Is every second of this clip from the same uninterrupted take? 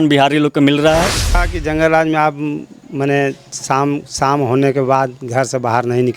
no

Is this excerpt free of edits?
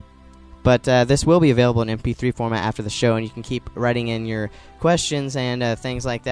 yes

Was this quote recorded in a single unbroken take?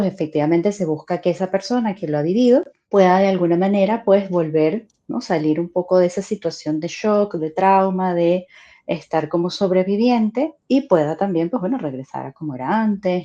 no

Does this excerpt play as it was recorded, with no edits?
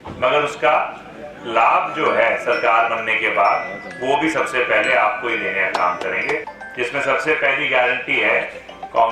no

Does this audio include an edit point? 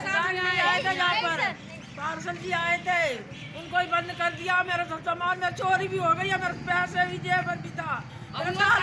no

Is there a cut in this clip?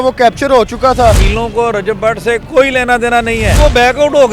yes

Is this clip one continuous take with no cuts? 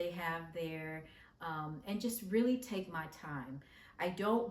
yes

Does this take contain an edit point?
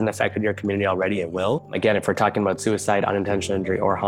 yes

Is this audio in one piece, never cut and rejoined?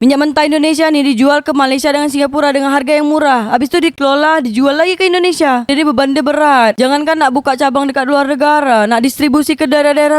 no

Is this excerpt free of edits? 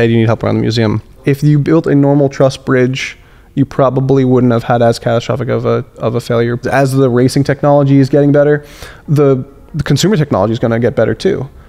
no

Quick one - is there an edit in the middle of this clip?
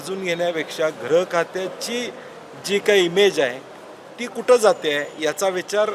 no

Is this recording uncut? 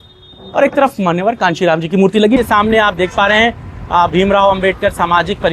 no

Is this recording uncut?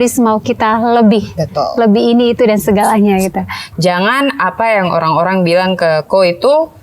no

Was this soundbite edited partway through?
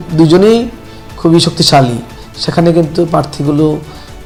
no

